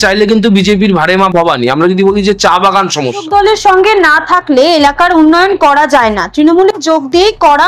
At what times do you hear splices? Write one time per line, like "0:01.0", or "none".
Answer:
0:03.2

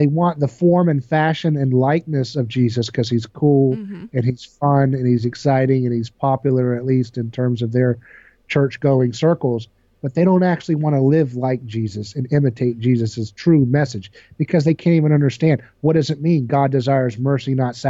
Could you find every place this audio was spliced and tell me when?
none

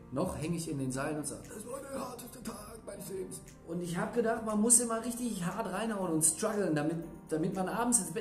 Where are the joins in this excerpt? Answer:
0:03.5

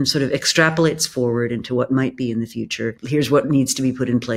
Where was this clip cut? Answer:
0:02.9

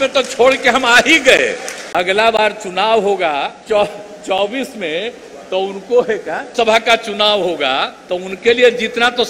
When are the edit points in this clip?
0:01.8
0:03.6
0:08.0

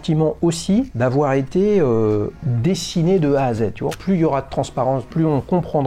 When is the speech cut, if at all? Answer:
0:00.9
0:02.3
0:03.9
0:05.1

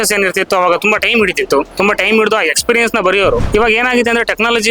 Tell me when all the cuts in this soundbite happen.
0:01.7
0:03.4

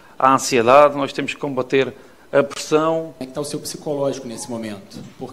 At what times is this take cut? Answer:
0:03.2

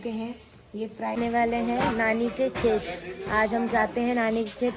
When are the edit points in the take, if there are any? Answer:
0:01.2

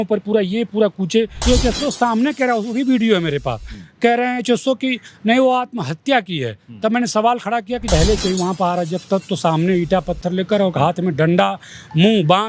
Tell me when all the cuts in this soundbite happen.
0:01.4
0:07.9

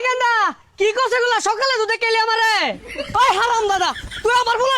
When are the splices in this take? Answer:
0:02.8

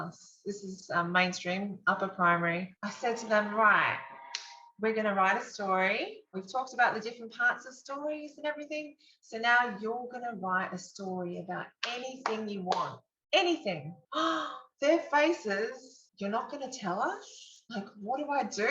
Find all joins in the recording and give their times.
0:02.7

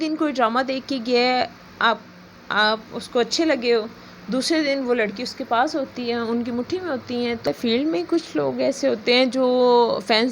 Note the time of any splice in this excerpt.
0:07.5

